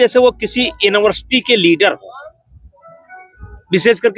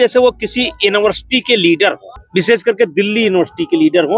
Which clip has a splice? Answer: second; 1 cut; at 2.1 s

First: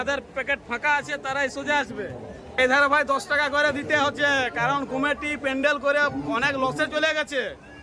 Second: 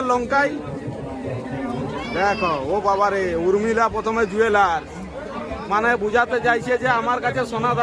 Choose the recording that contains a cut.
first; 1 cut; at 2.6 s

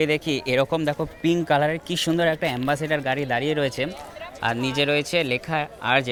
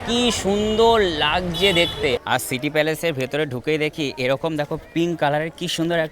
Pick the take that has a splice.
second; 1 cut; at 2.2 s

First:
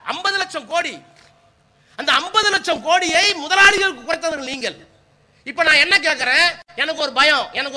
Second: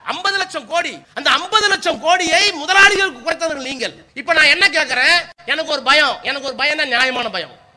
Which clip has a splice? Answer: second; 2 cuts; at 1.0 s, 4.1 s

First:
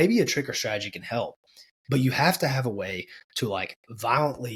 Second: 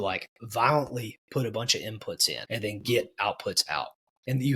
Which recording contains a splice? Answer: second; 1 cut; at 2.3 s

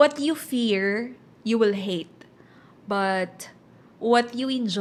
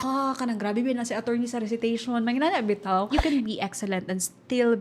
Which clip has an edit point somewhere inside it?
second; 1 cut; at 3.1 s

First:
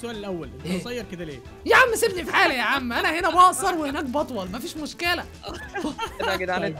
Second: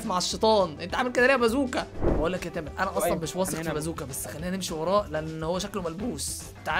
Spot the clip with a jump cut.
second; 1 cut; at 2.0 s

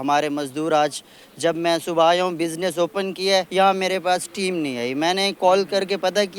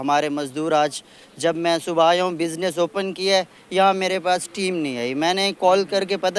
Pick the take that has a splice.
first; 1 cut; at 3.5 s

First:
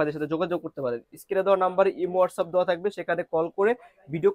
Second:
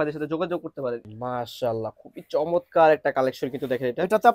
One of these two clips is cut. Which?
second; 1 cut; at 1.1 s

